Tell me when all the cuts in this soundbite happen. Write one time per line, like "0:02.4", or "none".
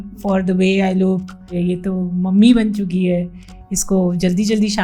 0:01.6